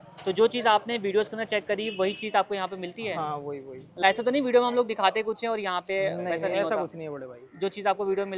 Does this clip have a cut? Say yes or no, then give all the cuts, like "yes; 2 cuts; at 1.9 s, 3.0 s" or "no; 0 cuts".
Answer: no; 0 cuts